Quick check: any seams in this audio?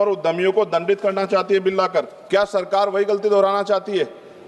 yes; 1 cut; at 2.2 s

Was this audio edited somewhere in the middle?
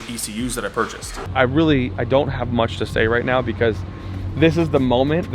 yes; 1 cut; at 1.3 s

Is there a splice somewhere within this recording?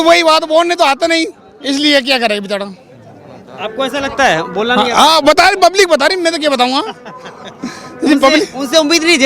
no; 0 cuts

